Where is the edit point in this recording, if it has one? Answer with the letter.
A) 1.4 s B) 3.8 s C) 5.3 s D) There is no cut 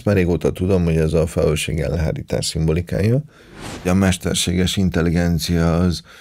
B